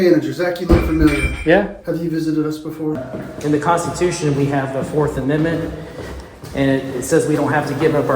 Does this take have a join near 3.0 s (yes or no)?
yes